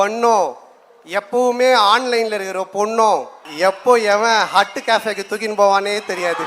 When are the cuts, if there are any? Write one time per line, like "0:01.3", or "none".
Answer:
0:03.4